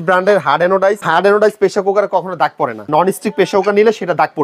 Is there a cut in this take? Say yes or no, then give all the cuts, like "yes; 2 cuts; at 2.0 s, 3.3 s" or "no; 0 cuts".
yes; 2 cuts; at 1.0 s, 2.9 s